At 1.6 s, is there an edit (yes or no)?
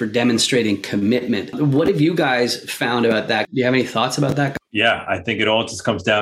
yes